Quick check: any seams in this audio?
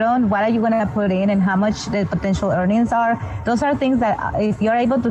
no; 0 cuts

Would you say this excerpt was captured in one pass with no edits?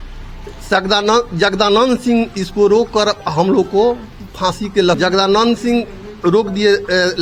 yes; 0 cuts

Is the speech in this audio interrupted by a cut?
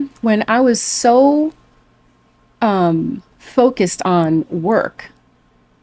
no; 0 cuts

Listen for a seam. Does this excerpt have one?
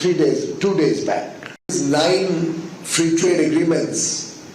yes; 1 cut; at 1.7 s

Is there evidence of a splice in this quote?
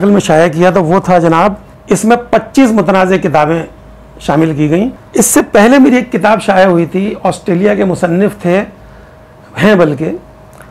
yes; 2 cuts; at 1.7 s, 5.0 s

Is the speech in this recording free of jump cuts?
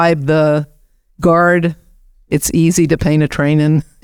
yes; 0 cuts

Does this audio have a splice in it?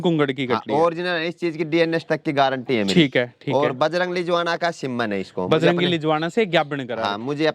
no; 0 cuts

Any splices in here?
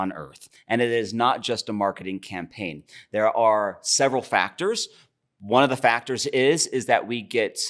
no; 0 cuts

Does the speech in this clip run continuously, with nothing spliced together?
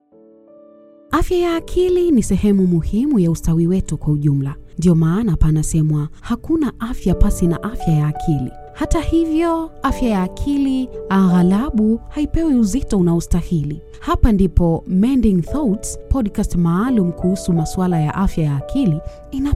no; 1 cut; at 1.1 s

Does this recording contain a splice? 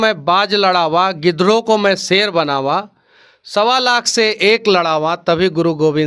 no; 0 cuts

